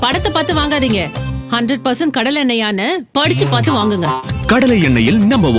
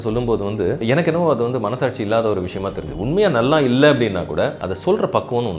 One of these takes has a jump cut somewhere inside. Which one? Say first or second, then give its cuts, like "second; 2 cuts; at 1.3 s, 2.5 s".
second; 2 cuts; at 0.8 s, 4.7 s